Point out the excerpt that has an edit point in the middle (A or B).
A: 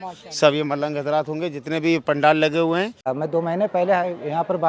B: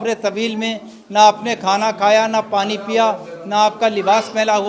A